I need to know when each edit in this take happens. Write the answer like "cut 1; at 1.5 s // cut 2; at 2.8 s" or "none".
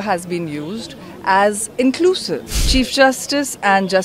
cut 1; at 2.5 s